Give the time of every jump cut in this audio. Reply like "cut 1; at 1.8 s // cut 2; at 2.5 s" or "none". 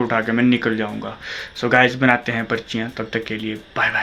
none

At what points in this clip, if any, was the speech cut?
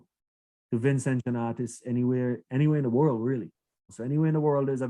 cut 1; at 3.8 s

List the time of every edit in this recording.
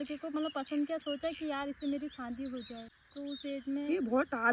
cut 1; at 2.8 s

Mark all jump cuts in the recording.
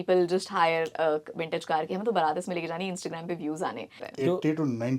cut 1; at 4.0 s

